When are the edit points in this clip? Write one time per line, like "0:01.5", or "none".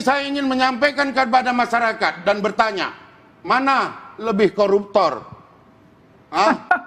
none